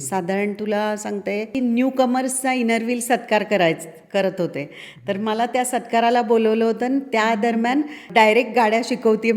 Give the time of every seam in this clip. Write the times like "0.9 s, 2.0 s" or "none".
1.5 s, 8.1 s